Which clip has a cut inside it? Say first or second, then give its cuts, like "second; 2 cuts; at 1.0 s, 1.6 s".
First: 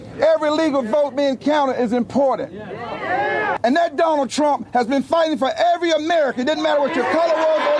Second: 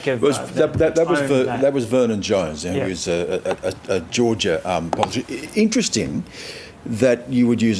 first; 1 cut; at 3.6 s